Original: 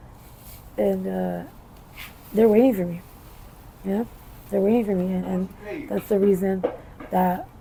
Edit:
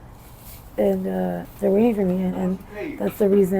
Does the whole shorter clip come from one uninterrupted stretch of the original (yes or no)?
no